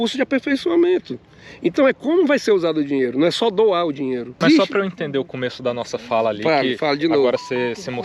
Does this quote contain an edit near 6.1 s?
no; 1 cut; at 4.4 s

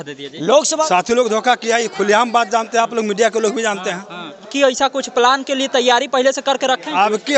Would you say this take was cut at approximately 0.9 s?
yes; 2 cuts; at 0.9 s, 4.5 s

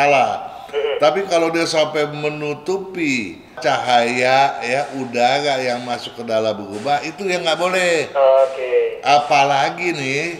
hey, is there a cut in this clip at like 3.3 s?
no; 0 cuts

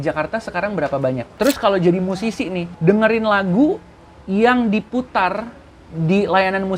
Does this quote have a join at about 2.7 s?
yes; 2 cuts; at 1.3 s, 2.7 s

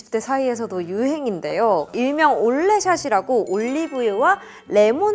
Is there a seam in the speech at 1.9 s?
yes; 1 cut; at 1.9 s

